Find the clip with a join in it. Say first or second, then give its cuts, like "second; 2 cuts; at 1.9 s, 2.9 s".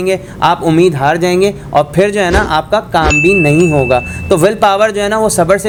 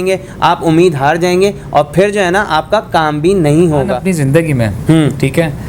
second; 1 cut; at 4.0 s